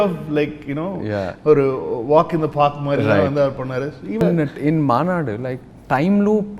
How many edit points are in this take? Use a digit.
1